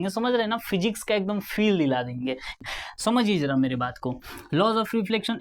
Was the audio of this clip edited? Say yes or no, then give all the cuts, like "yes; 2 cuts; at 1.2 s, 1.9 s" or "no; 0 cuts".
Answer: no; 0 cuts